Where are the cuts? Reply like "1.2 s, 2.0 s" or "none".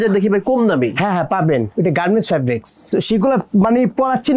2.9 s

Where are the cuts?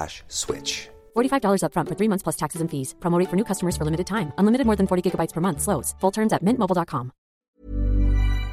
7.6 s

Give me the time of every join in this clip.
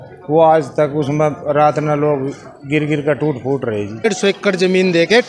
4.0 s

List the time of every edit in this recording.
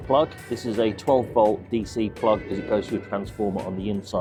none

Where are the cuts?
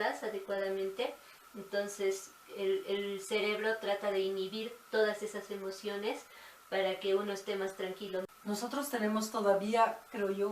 8.3 s

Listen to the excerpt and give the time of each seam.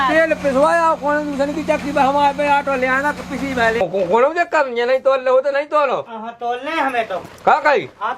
3.8 s

